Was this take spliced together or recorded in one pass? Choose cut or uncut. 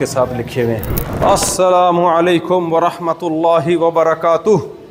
cut